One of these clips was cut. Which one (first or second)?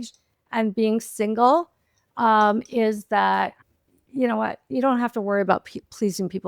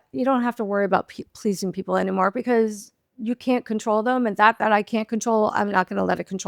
first